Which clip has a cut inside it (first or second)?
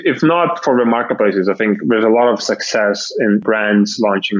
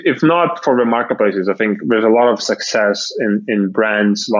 first